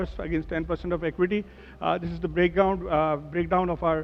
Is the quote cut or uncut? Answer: uncut